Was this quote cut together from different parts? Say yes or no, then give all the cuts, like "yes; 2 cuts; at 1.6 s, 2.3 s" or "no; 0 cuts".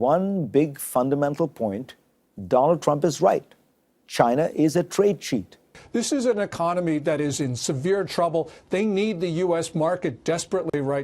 yes; 1 cut; at 5.7 s